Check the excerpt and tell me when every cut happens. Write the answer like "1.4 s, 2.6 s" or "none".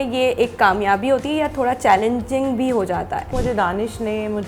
3.3 s